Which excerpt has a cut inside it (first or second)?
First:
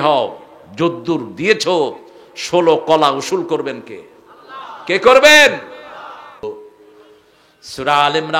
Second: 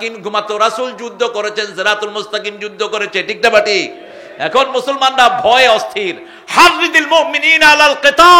first